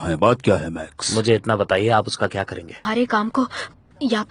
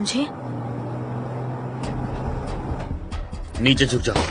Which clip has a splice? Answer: first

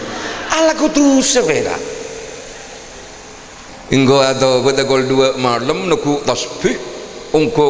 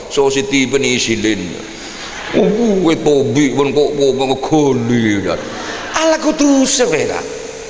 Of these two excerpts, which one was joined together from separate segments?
first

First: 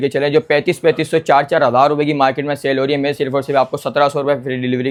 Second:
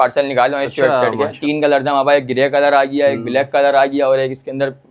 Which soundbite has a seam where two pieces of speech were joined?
second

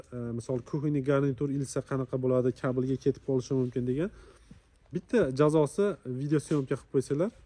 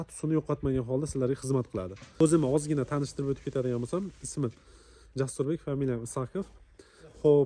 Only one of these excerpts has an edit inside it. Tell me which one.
second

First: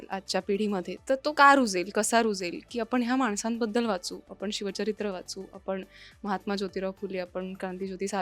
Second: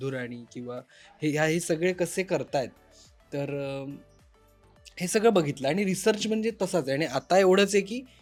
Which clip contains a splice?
first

